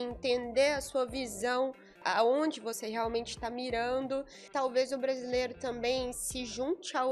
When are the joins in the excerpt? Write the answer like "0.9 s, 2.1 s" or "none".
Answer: 2.0 s, 4.4 s